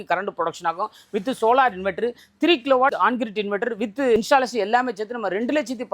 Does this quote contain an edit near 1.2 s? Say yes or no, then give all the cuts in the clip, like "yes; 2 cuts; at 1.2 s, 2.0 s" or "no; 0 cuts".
no; 2 cuts; at 2.9 s, 4.2 s